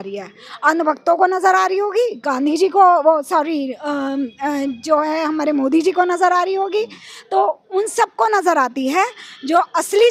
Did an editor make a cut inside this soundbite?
no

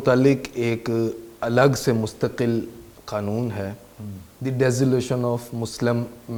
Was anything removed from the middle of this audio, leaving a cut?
no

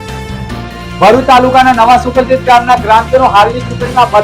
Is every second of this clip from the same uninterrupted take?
yes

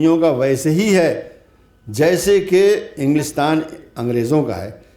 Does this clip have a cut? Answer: no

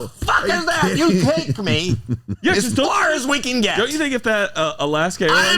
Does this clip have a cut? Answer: no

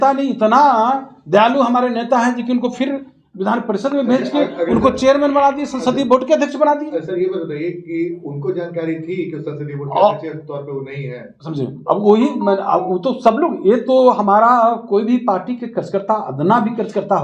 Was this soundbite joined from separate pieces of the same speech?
no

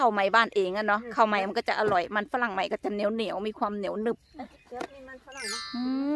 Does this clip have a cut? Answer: no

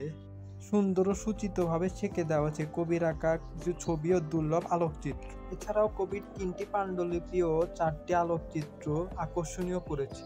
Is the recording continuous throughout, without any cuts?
yes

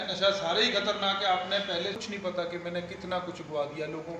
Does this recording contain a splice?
yes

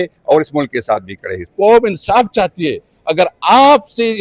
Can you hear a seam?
yes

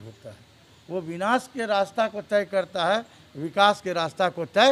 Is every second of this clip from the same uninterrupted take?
yes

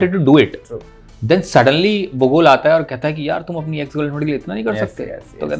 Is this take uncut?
yes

